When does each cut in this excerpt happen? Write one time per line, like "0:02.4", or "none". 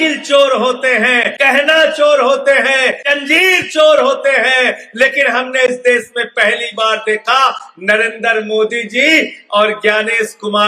0:01.3
0:03.1